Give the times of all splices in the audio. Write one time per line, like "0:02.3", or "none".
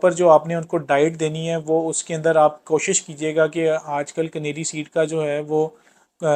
none